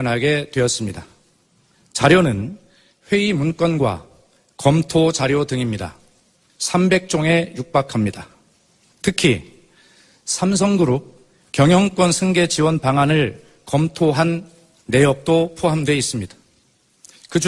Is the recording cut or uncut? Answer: uncut